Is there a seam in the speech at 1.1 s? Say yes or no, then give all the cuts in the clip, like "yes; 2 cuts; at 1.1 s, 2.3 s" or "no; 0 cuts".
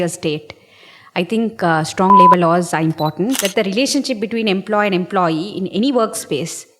no; 1 cut; at 3.4 s